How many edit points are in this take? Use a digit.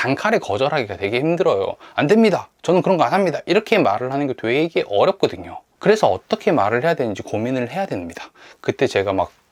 0